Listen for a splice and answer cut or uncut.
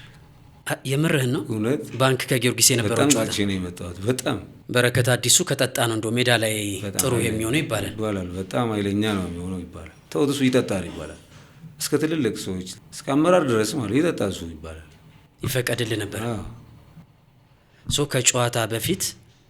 cut